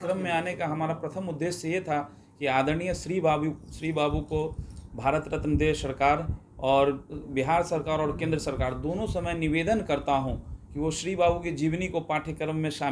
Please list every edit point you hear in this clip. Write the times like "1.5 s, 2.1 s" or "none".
none